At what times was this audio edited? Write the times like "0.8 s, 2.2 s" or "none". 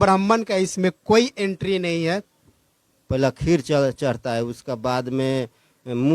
2.4 s